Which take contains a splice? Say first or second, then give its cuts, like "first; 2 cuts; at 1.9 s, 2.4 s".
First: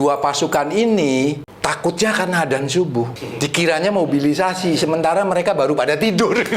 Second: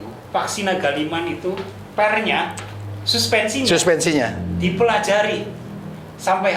first; 2 cuts; at 1.5 s, 3.2 s